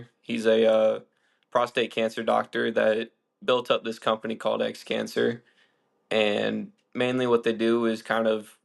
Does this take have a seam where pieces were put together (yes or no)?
no